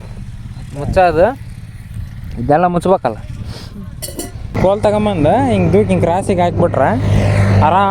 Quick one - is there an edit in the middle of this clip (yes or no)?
yes